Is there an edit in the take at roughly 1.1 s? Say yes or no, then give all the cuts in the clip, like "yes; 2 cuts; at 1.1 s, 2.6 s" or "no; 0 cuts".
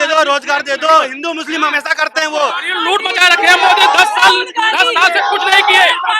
yes; 2 cuts; at 1.1 s, 2.7 s